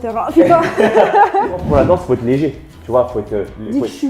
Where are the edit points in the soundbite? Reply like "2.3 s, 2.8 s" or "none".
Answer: 1.6 s